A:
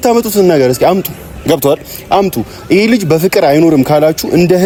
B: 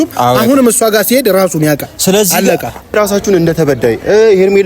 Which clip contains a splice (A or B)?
B